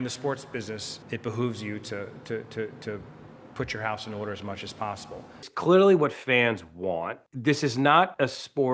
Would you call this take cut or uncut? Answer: uncut